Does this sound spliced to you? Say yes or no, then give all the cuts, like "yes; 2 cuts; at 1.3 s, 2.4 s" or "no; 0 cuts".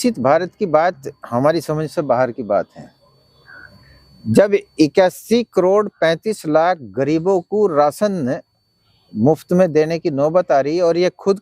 no; 0 cuts